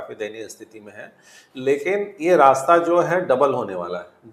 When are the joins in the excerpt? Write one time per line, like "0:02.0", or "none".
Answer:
none

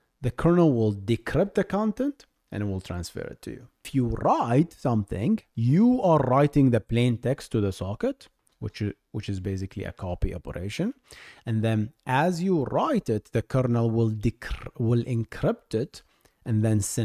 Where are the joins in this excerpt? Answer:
0:03.9
0:05.5

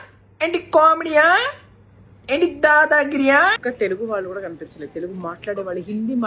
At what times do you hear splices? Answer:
0:03.5

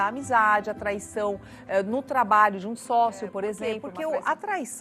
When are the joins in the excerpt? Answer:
0:03.9

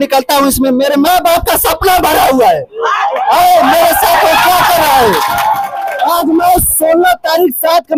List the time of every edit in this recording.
none

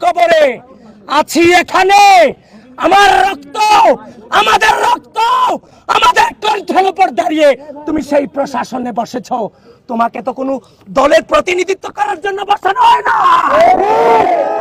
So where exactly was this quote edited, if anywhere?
none

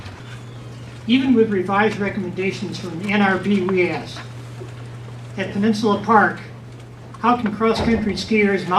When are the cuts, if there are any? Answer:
0:06.4

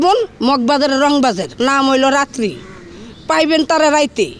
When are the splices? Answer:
0:01.5

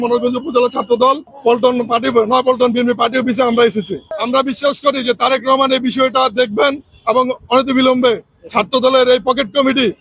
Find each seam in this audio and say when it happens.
0:01.3
0:04.2

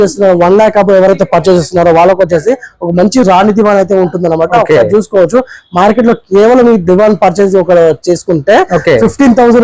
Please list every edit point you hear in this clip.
none

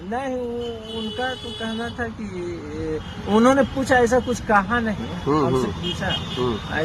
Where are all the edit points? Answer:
none

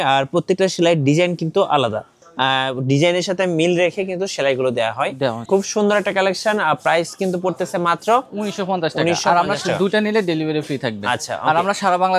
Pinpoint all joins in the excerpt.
none

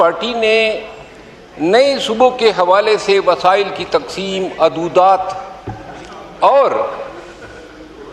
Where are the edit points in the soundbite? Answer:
none

